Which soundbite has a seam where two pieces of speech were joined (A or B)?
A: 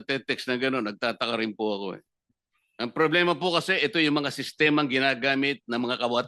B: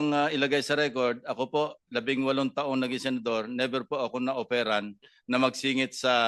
A